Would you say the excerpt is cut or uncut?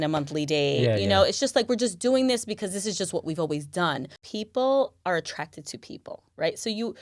cut